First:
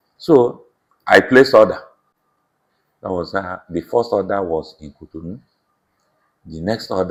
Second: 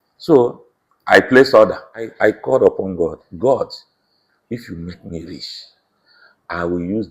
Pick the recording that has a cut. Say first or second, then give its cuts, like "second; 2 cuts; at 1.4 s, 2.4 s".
second; 1 cut; at 2.1 s